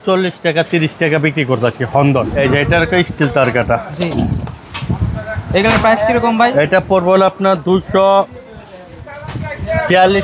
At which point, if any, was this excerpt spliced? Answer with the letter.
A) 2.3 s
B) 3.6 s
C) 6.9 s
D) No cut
A